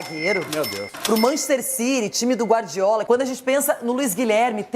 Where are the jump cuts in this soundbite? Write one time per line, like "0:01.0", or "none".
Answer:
0:03.0